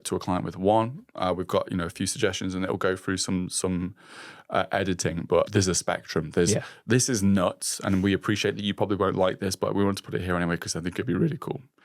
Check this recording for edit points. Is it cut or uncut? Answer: cut